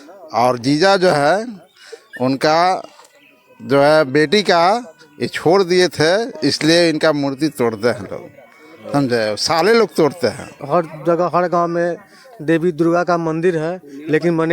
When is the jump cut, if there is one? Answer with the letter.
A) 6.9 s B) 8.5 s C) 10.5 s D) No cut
C